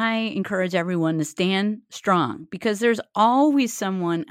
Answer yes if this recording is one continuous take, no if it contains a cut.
yes